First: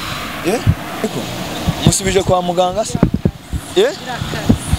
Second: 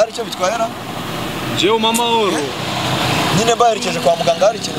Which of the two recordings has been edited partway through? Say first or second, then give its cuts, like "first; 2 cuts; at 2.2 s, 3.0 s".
first; 1 cut; at 1.0 s